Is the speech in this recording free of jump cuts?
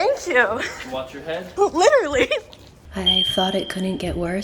no; 2 cuts; at 1.5 s, 2.8 s

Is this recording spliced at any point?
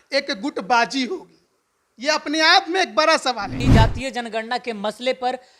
yes; 1 cut; at 3.6 s

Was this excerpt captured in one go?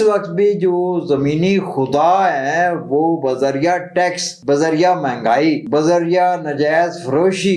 no; 2 cuts; at 4.3 s, 5.6 s

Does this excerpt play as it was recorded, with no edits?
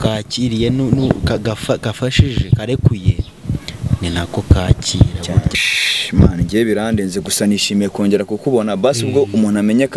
no; 1 cut; at 5.5 s

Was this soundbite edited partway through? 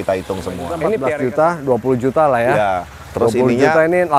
yes; 1 cut; at 1.0 s

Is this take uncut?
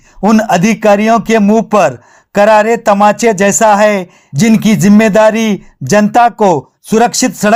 yes; 0 cuts

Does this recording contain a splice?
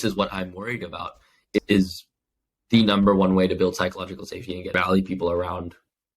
yes; 2 cuts; at 1.6 s, 4.7 s

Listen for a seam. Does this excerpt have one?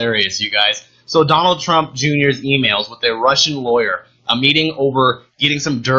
no; 0 cuts

